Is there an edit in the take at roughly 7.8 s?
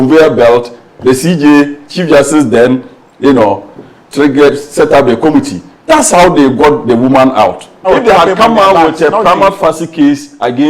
yes; 1 cut; at 7.8 s

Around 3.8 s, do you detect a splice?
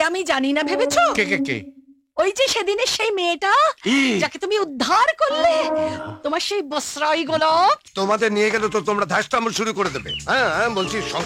no; 1 cut; at 7.9 s

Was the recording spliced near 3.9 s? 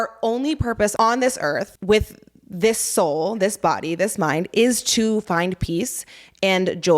no; 2 cuts; at 0.9 s, 1.7 s

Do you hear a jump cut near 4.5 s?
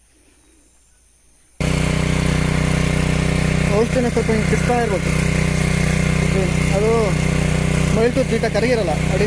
no; 1 cut; at 1.6 s

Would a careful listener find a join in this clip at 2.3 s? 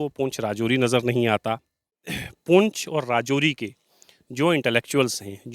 yes; 1 cut; at 2.3 s

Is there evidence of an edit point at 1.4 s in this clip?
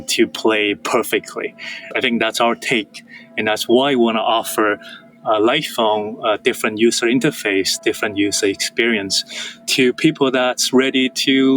yes; 1 cut; at 1.4 s

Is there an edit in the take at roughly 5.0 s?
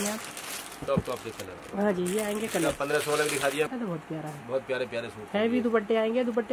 no; 1 cut; at 3.7 s

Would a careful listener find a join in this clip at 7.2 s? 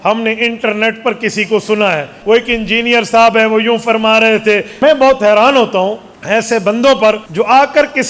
yes; 4 cuts; at 2.1 s, 4.7 s, 6.1 s, 7.2 s

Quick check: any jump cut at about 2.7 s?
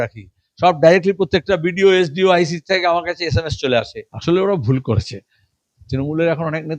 no; 1 cut; at 4.0 s

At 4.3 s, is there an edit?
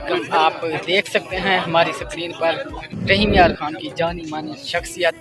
no; 0 cuts

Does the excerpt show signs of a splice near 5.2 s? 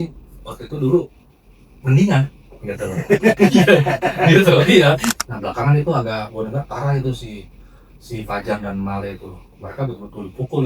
yes; 1 cut; at 5.2 s

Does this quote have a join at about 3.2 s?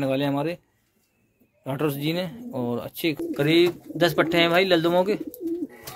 yes; 1 cut; at 3.2 s

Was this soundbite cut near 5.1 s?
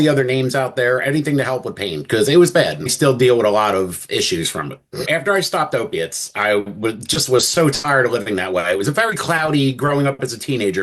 yes; 1 cut; at 5.1 s

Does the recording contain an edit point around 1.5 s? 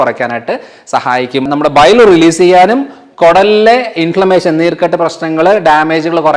yes; 1 cut; at 1.5 s

